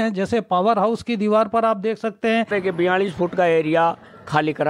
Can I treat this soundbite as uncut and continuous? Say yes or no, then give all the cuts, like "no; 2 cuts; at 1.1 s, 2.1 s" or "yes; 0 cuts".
no; 1 cut; at 2.5 s